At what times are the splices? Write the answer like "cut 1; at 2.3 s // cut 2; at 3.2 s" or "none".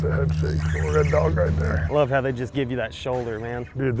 cut 1; at 1.8 s

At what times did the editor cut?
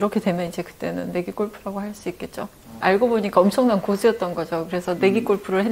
cut 1; at 2.6 s

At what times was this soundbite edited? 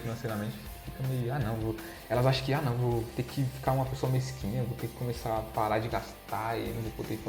none

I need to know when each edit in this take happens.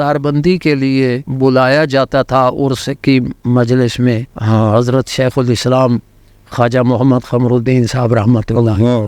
cut 1; at 1.3 s // cut 2; at 4.3 s

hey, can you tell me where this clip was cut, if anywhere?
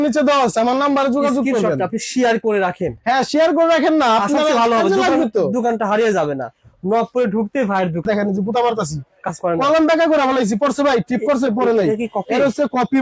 cut 1; at 8.0 s

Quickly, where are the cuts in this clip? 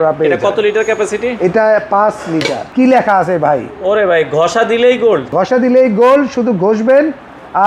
cut 1; at 2.6 s // cut 2; at 5.3 s

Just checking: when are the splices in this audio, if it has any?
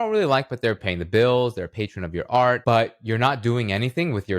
cut 1; at 0.9 s // cut 2; at 2.6 s

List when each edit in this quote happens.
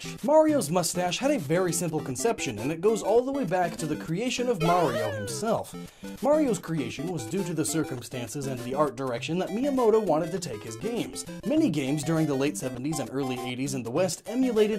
cut 1; at 4.7 s

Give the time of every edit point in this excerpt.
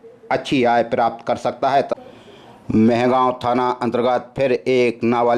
cut 1; at 1.9 s

